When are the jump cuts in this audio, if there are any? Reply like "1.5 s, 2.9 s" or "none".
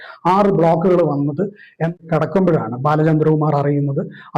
1.9 s